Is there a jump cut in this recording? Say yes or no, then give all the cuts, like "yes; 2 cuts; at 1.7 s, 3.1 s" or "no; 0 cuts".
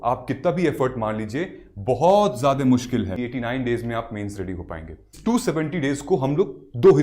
yes; 2 cuts; at 3.2 s, 5.0 s